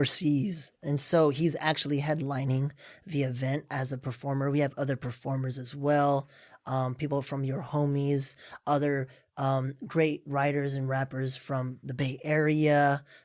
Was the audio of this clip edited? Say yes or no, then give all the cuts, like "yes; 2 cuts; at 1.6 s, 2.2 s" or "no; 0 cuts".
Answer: no; 0 cuts